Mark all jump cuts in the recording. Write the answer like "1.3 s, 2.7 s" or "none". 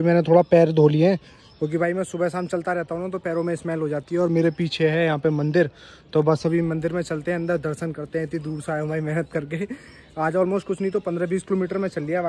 none